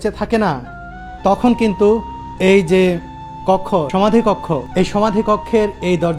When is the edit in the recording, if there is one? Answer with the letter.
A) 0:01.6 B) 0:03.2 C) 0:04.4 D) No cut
D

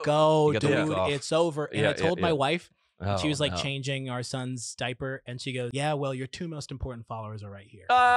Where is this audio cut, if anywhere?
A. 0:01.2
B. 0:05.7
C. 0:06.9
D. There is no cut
B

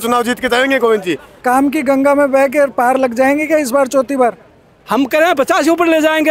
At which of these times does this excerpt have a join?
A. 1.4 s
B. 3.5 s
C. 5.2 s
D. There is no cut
A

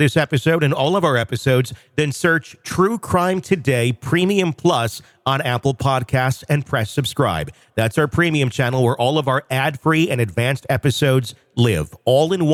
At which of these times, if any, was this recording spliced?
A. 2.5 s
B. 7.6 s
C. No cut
C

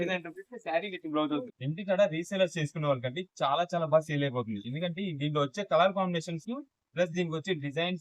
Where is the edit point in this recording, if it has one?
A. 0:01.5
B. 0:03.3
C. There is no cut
A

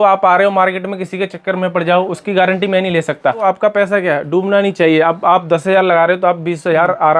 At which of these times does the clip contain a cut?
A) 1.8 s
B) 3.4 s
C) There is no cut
B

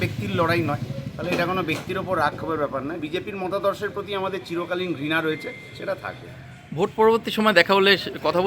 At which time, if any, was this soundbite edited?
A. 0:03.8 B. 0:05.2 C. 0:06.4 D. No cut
D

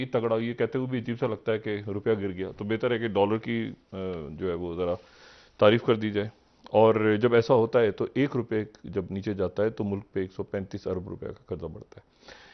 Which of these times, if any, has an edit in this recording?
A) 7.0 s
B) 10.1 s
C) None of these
C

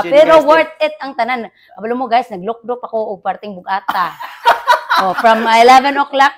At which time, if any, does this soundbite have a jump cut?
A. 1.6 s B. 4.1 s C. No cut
C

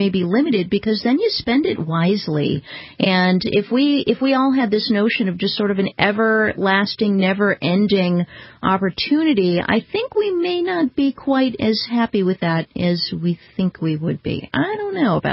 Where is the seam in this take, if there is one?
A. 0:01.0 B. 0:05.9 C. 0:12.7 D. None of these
A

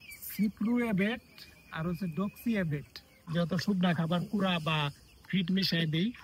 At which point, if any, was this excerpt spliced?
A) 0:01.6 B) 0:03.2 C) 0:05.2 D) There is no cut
B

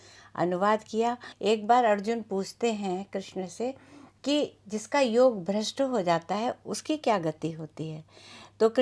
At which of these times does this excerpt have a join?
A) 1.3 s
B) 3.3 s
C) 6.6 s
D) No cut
A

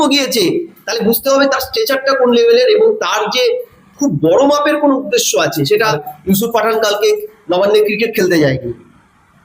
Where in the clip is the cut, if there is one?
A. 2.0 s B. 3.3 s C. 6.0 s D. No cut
C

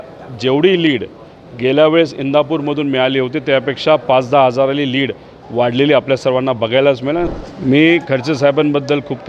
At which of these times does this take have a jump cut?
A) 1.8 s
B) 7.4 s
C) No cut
B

